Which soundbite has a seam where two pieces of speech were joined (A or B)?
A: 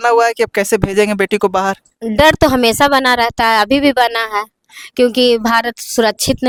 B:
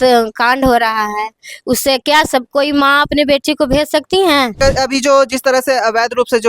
B